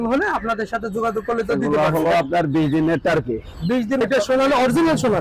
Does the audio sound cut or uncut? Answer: cut